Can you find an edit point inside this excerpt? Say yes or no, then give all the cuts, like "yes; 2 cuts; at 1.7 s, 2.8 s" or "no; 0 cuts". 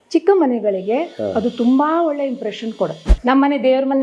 yes; 1 cut; at 3.1 s